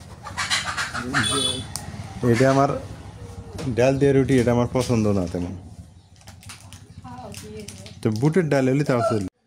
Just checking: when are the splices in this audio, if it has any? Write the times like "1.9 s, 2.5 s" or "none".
none

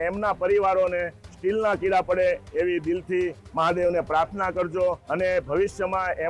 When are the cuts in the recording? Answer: 5.0 s

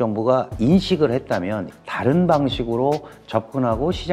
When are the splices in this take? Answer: 1.6 s

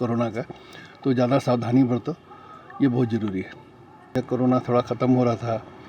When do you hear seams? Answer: 4.2 s

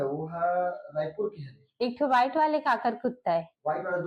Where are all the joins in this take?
none

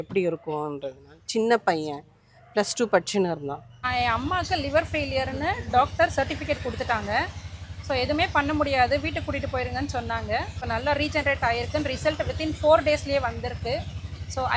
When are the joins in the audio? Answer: 3.8 s, 10.6 s

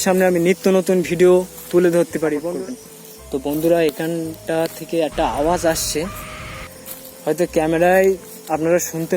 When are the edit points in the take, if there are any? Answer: 2.4 s

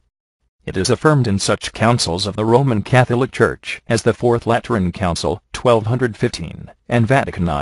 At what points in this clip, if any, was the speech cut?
none

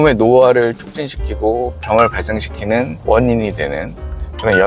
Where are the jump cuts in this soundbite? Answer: 3.0 s

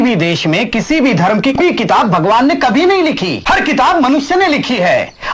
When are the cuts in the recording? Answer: 1.6 s, 3.3 s

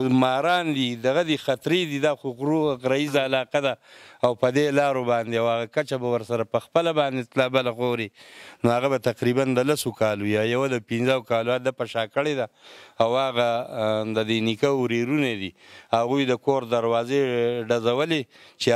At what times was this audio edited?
none

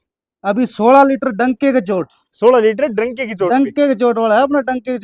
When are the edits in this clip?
none

